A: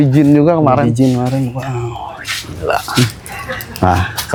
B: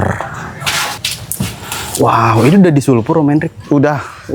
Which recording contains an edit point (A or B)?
B